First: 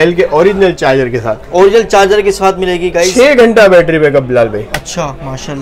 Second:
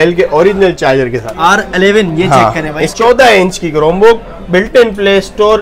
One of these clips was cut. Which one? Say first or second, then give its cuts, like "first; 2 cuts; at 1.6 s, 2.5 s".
second; 2 cuts; at 1.3 s, 2.8 s